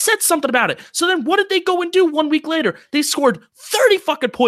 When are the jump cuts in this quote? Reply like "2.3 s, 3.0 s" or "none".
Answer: none